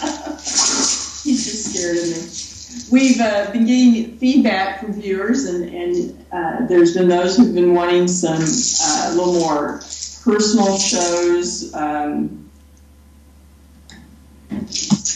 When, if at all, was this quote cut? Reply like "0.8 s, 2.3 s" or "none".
12.1 s